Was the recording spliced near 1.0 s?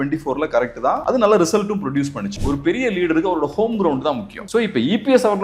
yes; 3 cuts; at 1.0 s, 2.4 s, 4.3 s

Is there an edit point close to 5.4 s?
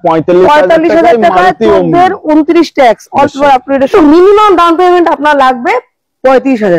no; 1 cut; at 3.9 s

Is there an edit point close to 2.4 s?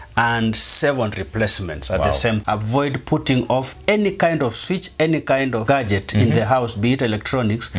yes; 2 cuts; at 2.4 s, 5.6 s

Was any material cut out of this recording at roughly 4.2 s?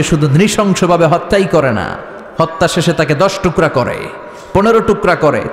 no; 0 cuts

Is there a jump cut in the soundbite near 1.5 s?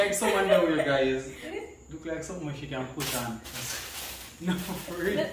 yes; 1 cut; at 1.5 s

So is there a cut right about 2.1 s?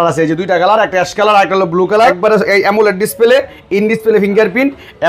yes; 1 cut; at 2.1 s

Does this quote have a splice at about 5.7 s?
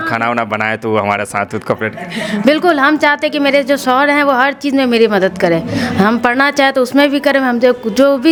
no; 0 cuts

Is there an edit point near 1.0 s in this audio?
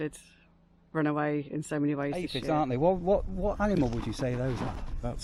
no; 1 cut; at 2.4 s

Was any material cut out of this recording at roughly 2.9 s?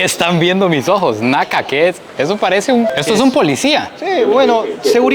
yes; 1 cut; at 2.9 s

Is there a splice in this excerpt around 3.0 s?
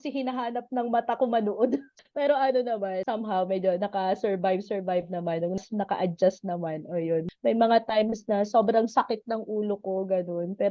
yes; 3 cuts; at 3.0 s, 5.6 s, 7.3 s

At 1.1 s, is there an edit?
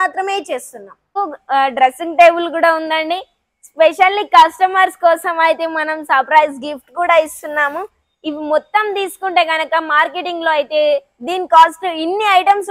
yes; 1 cut; at 1.1 s

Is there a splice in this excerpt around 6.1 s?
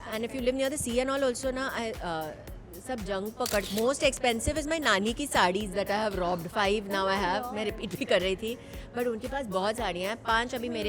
no; 1 cut; at 3.7 s

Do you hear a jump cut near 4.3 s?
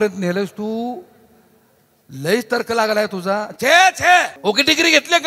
yes; 1 cut; at 4.3 s

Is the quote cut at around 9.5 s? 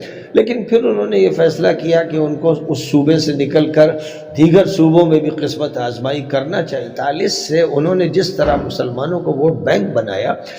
no; 1 cut; at 6.8 s

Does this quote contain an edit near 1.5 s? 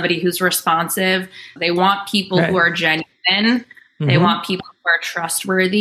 yes; 1 cut; at 1.5 s

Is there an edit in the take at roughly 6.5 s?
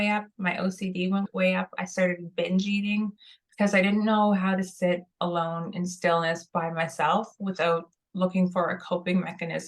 no; 1 cut; at 1.3 s

